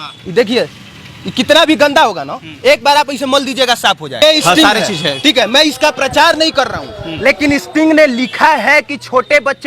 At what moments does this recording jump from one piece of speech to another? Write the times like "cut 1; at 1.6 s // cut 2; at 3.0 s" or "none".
cut 1; at 4.2 s